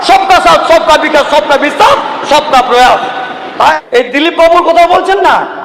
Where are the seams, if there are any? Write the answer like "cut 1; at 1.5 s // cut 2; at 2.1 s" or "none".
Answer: cut 1; at 3.8 s